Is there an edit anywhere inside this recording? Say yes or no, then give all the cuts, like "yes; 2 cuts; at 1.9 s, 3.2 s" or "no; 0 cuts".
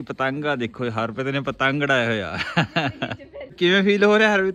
yes; 1 cut; at 3.5 s